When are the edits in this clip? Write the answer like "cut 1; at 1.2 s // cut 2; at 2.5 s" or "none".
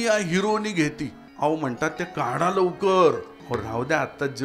cut 1; at 1.2 s // cut 2; at 3.3 s